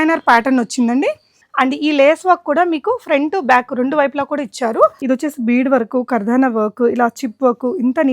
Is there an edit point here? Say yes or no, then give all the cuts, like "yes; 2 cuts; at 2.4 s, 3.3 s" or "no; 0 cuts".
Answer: yes; 2 cuts; at 1.4 s, 5.0 s